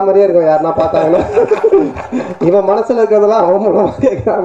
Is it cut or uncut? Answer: uncut